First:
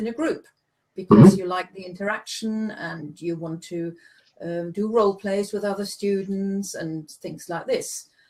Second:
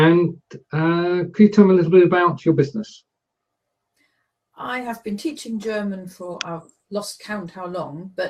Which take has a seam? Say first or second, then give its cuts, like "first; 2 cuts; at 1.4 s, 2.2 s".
second; 1 cut; at 2.4 s